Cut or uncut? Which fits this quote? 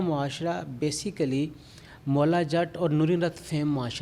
uncut